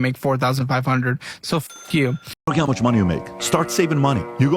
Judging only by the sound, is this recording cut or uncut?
cut